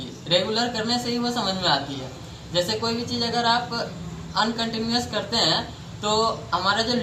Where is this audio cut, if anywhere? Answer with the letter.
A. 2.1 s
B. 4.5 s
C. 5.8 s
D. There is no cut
D